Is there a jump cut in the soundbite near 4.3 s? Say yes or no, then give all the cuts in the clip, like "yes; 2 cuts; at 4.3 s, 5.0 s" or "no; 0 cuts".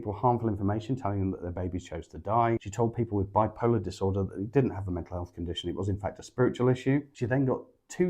no; 1 cut; at 2.7 s